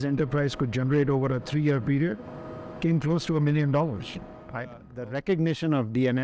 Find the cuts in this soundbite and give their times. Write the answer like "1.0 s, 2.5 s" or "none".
4.9 s